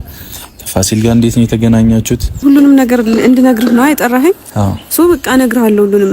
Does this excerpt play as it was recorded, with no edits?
no; 1 cut; at 2.4 s

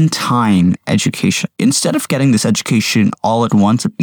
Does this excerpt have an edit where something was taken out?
yes; 1 cut; at 1.6 s

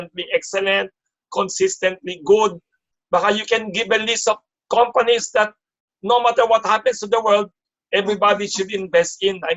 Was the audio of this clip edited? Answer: no; 0 cuts

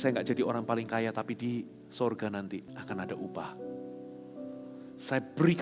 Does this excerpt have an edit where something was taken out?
yes; 1 cut; at 2.7 s

